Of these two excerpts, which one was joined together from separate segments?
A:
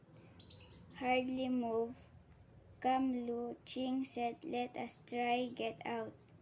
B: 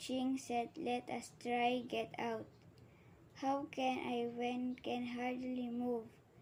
A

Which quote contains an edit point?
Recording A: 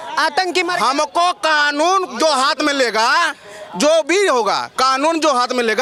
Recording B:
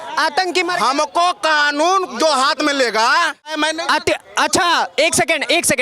B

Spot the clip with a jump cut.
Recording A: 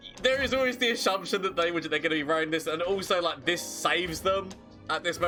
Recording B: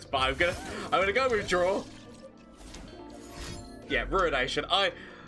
B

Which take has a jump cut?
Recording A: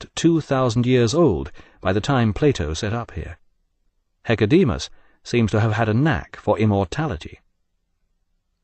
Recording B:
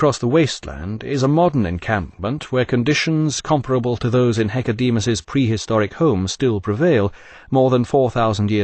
A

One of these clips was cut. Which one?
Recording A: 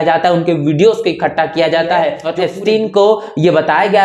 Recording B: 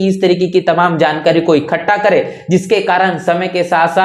A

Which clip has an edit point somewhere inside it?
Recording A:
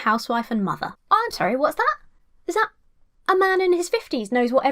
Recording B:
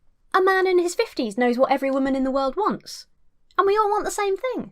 A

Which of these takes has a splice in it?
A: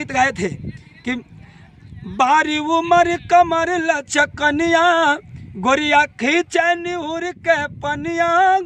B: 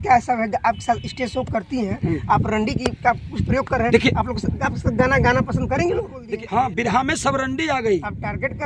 B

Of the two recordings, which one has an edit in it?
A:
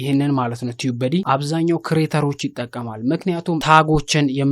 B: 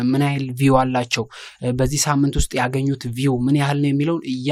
A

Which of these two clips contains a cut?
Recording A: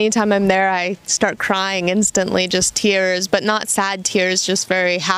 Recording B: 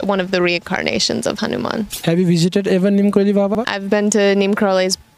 B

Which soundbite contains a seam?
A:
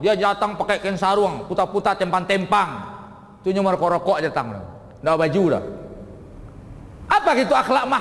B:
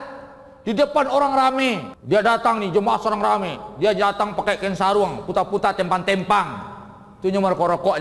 B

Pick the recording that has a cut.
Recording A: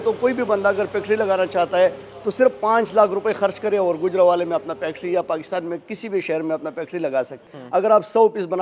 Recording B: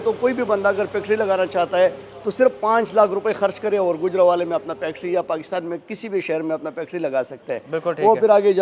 A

